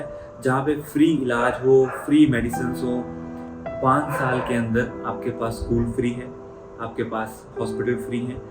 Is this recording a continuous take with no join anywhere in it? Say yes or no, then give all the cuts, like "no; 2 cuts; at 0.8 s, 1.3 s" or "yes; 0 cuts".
no; 1 cut; at 3.3 s